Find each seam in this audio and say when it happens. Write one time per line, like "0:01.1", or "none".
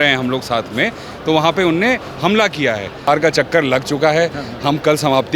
0:03.1